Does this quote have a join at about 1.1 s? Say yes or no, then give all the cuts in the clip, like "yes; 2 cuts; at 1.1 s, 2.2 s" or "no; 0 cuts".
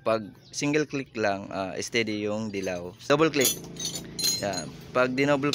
no; 1 cut; at 3.0 s